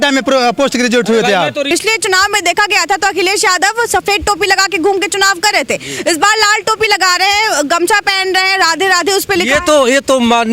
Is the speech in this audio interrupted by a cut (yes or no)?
yes